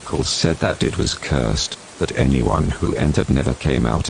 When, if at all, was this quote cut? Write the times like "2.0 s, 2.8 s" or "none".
none